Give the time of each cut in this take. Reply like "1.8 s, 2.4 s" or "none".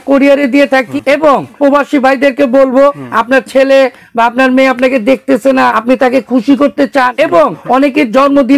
1.4 s, 3.0 s, 5.8 s, 7.3 s